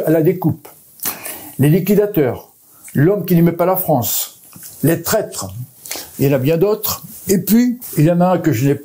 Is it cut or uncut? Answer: cut